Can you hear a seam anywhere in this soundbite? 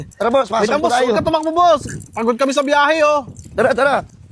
no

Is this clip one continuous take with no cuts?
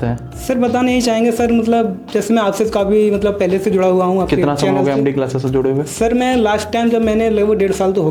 yes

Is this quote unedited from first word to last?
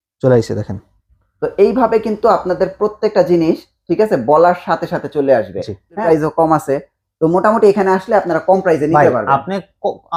yes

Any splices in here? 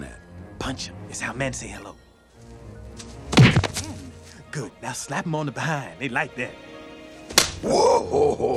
no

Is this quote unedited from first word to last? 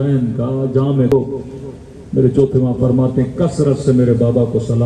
no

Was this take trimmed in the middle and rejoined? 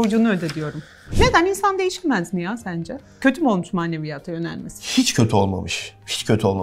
yes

